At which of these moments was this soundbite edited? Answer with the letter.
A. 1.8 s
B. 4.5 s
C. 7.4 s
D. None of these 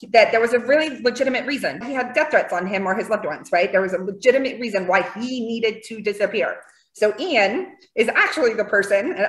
A